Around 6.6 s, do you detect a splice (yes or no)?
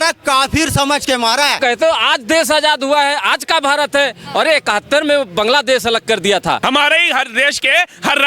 yes